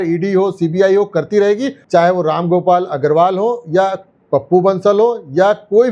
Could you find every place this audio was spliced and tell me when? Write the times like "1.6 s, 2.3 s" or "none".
1.7 s